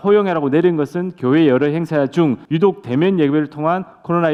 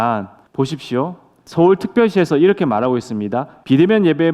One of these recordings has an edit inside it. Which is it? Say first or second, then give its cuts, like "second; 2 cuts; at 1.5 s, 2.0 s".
second; 1 cut; at 1.3 s